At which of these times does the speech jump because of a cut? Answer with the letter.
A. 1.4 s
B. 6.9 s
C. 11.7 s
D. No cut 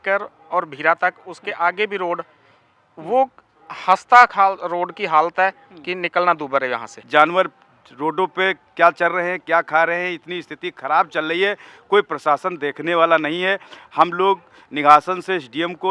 B